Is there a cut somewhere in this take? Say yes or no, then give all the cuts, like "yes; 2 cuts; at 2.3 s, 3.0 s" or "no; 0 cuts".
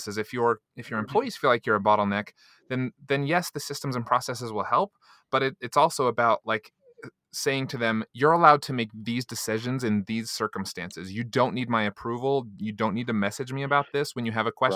no; 0 cuts